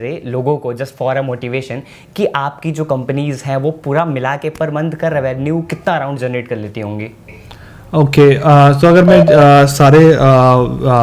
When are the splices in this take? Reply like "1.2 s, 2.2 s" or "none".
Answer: none